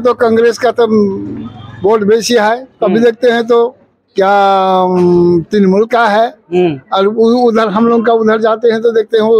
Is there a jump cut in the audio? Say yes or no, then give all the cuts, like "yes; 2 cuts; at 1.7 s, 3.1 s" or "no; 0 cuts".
no; 0 cuts